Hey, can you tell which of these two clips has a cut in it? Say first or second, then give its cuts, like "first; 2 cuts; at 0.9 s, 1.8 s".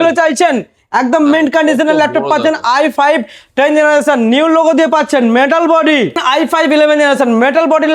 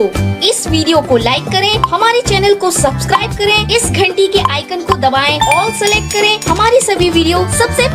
first; 1 cut; at 6.2 s